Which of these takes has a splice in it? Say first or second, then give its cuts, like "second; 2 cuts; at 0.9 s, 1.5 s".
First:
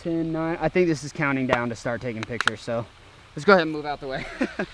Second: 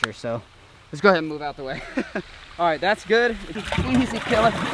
second; 1 cut; at 3.5 s